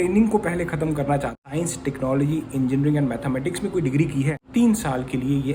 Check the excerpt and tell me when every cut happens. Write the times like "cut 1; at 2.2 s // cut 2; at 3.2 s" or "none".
cut 1; at 1.4 s // cut 2; at 4.4 s